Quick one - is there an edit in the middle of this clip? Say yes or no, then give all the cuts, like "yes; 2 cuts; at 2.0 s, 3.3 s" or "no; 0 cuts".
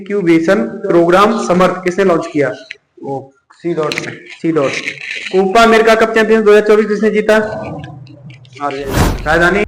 no; 0 cuts